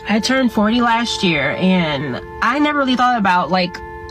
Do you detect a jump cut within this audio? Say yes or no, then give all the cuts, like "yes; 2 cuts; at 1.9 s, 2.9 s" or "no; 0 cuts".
no; 0 cuts